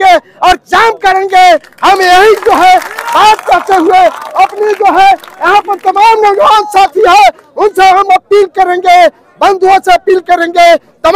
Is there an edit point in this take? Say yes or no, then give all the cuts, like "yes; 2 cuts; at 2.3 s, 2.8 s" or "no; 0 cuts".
no; 0 cuts